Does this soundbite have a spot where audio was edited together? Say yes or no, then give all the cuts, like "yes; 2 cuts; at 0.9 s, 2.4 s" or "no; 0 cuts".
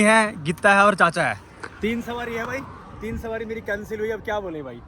no; 0 cuts